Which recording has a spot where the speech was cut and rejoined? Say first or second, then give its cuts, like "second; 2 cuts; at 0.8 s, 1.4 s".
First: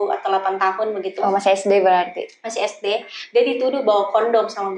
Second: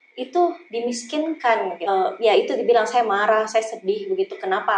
second; 1 cut; at 1.9 s